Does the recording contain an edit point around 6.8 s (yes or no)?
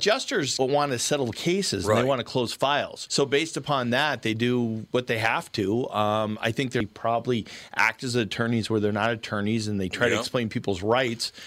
yes